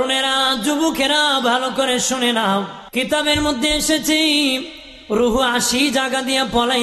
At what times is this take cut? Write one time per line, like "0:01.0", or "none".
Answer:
0:02.8